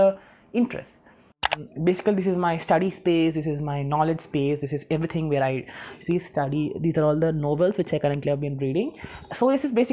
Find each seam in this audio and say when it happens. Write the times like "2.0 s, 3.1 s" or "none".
1.5 s